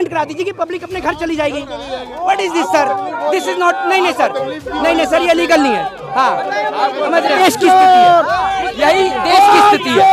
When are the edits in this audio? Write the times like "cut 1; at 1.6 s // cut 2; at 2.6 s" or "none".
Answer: cut 1; at 7.4 s